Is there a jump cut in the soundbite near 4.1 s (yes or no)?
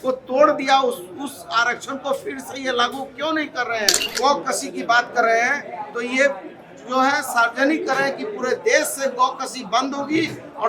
yes